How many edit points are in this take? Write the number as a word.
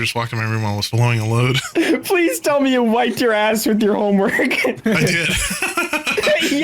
two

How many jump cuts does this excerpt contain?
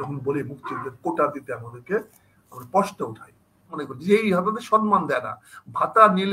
one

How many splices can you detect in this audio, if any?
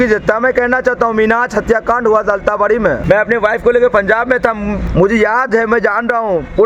two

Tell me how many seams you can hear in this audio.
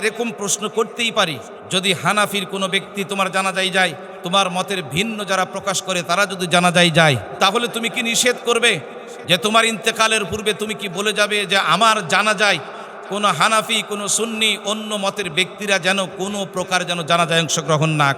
three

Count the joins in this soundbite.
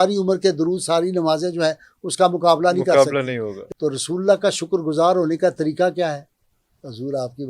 one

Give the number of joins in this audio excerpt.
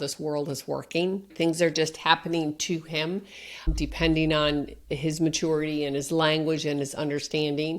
one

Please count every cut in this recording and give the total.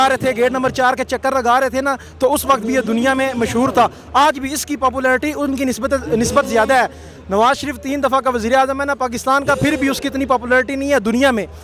zero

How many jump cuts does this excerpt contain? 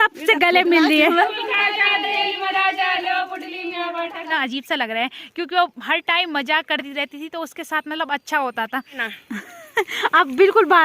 three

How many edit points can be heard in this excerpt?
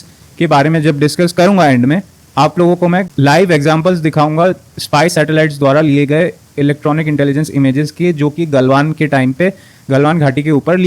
zero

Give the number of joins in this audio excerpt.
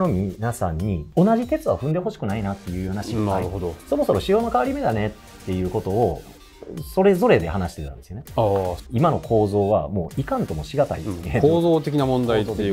three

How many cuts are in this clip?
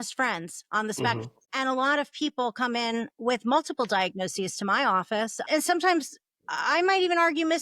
two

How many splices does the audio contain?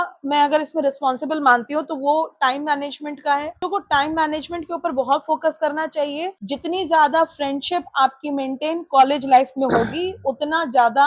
two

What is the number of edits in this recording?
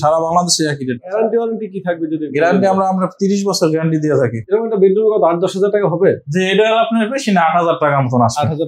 two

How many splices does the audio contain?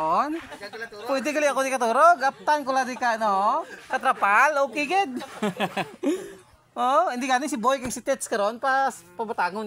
zero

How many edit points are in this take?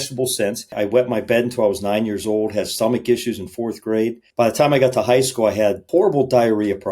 three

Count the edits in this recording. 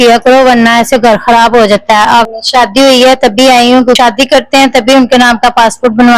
two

